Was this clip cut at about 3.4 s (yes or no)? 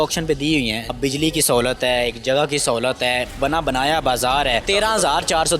yes